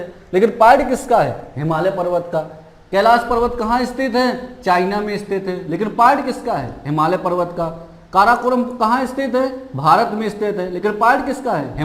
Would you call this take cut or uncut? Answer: uncut